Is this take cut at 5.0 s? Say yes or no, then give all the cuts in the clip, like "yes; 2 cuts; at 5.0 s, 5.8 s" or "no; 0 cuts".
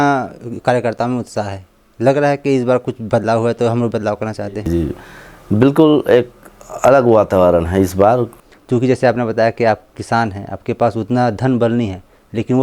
no; 1 cut; at 8.3 s